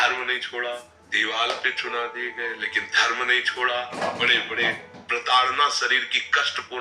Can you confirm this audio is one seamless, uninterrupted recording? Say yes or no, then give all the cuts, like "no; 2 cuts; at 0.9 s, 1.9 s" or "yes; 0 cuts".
no; 2 cuts; at 1.0 s, 4.0 s